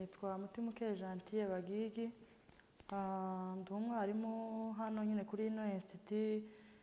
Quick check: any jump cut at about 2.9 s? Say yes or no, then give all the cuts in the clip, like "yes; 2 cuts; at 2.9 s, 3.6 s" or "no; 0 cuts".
no; 0 cuts